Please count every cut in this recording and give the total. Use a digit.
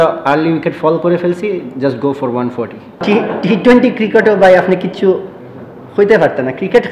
1